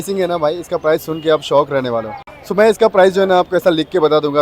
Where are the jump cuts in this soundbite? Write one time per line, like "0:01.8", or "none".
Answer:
none